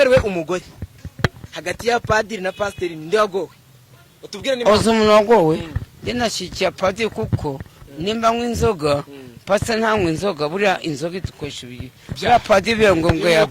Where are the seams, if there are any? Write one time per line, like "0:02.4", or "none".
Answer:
none